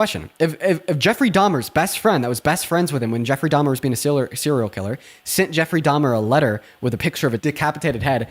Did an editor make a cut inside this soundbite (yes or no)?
yes